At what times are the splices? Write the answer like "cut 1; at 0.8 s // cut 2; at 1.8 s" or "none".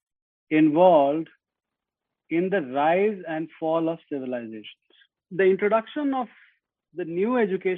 cut 1; at 5.2 s